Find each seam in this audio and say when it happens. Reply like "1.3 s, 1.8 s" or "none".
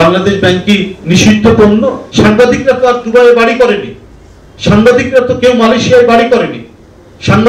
2.0 s